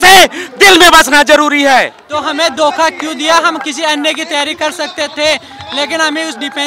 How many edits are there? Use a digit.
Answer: 1